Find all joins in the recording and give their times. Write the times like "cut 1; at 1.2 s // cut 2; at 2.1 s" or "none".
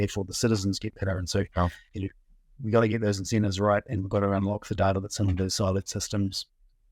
none

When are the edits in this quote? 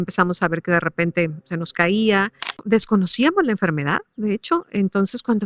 cut 1; at 2.6 s

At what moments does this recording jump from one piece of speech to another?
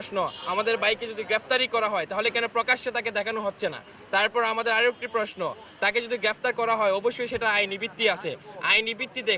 none

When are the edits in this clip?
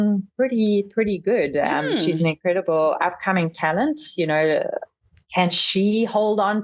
none

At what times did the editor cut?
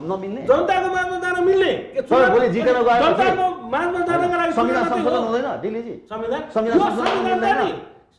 none

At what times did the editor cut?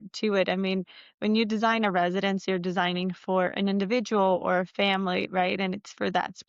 none

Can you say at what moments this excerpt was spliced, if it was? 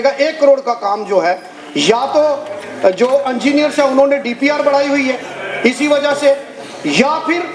none

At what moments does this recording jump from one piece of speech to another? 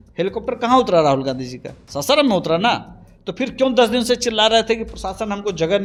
none

